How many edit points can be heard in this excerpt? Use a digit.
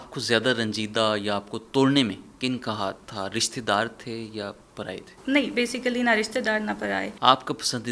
2